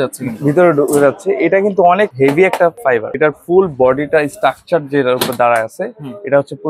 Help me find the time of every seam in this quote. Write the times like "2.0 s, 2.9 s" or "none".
2.1 s, 2.9 s